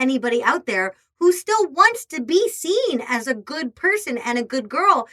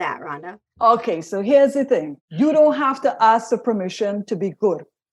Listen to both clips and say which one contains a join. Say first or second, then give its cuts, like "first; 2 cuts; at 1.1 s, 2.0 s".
second; 1 cut; at 2.2 s